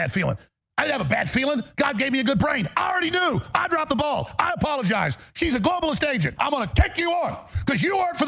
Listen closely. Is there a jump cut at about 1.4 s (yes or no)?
no